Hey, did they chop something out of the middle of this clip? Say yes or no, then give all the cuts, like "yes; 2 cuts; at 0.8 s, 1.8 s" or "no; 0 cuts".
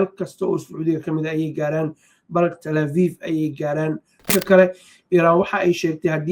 yes; 1 cut; at 4.3 s